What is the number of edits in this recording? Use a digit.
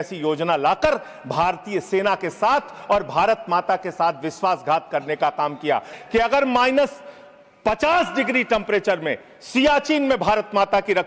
1